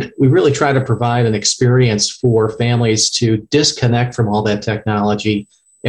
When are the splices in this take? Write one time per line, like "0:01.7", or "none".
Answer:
none